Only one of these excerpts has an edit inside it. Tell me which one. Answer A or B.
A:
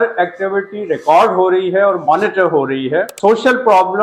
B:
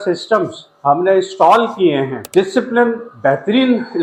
A